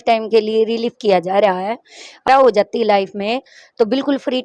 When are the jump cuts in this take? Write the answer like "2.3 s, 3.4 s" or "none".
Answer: 2.3 s